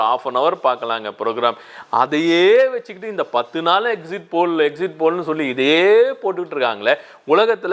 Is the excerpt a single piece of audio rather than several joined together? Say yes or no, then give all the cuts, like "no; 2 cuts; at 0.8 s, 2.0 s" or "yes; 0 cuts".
yes; 0 cuts